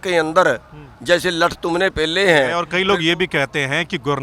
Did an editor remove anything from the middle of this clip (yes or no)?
yes